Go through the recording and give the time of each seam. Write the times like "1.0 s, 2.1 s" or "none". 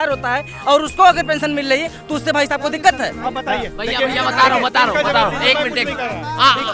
none

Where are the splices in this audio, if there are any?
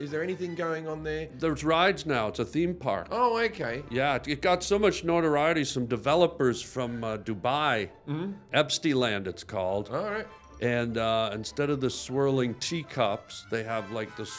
8.4 s

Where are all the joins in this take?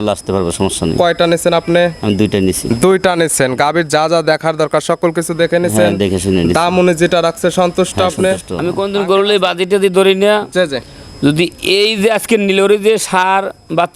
8.6 s

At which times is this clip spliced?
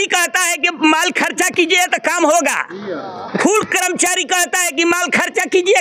none

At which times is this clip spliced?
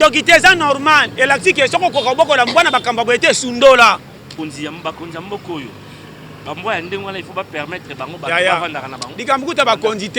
4.3 s

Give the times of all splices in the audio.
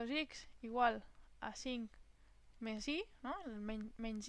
none

